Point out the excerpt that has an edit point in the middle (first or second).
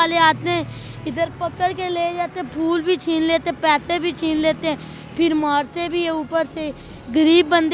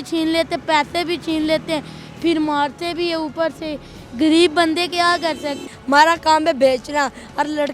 second